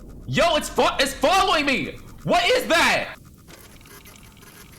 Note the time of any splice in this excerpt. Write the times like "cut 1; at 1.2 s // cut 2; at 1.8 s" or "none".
none